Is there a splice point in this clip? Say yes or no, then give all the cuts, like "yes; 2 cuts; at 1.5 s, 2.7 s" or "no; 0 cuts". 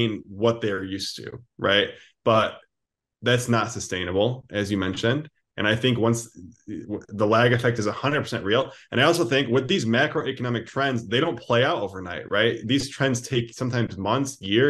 no; 0 cuts